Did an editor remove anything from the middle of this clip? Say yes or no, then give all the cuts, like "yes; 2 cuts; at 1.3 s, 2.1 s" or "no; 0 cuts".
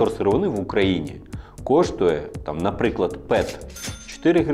no; 0 cuts